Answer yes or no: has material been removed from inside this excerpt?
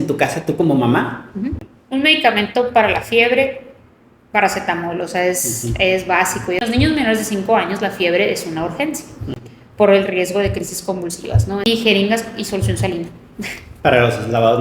yes